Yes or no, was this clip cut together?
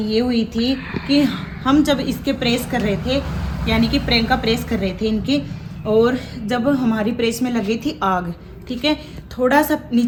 no